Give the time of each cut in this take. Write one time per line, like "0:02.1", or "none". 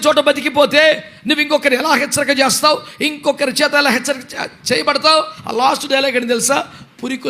0:05.4